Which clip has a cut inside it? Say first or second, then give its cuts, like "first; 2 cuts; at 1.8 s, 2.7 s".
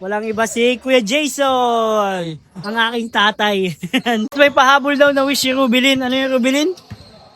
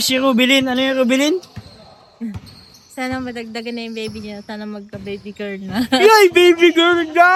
first; 1 cut; at 4.3 s